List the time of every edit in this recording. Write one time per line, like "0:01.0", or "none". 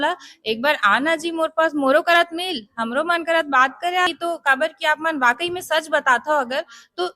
0:04.1